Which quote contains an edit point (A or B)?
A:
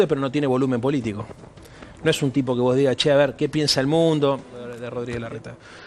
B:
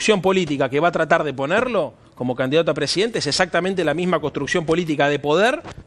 A